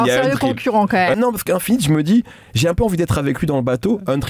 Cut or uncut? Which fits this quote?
cut